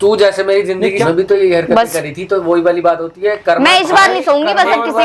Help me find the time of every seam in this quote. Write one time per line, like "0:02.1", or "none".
0:01.0